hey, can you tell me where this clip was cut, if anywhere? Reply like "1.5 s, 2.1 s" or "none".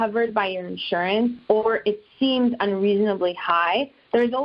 none